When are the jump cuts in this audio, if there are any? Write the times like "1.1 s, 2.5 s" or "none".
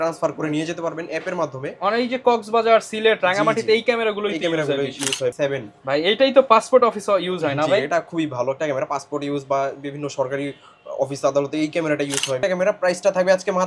5.3 s, 12.4 s